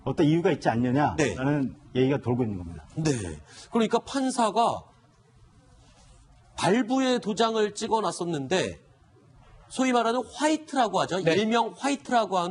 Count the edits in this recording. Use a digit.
0